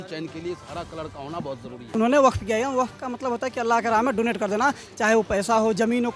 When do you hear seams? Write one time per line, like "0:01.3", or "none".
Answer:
0:01.9